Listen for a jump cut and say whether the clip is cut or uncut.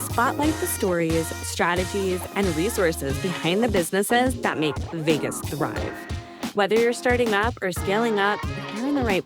uncut